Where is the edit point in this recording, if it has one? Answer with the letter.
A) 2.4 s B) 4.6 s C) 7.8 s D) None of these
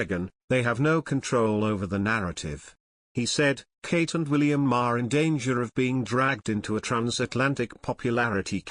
D